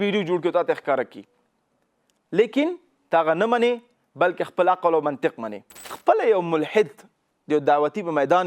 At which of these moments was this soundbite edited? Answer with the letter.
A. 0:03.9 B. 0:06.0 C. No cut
B